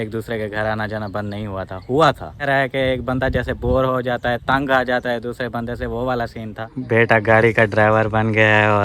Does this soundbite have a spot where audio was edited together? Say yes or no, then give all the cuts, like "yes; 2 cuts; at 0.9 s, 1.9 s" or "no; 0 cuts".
yes; 2 cuts; at 2.4 s, 6.6 s